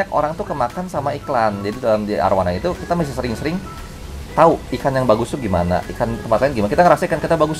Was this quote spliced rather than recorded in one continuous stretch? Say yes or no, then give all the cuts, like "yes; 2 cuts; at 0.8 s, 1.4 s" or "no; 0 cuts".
no; 0 cuts